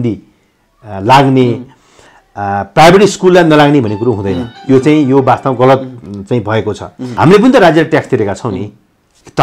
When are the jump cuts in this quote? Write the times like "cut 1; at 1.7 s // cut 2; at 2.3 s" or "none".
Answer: cut 1; at 7.2 s